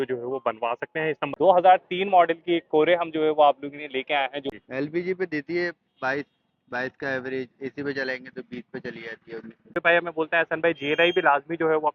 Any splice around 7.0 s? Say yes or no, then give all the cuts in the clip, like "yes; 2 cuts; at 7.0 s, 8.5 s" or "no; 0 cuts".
no; 3 cuts; at 1.3 s, 4.5 s, 9.7 s